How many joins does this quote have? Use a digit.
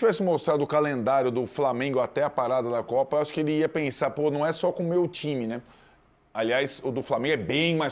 0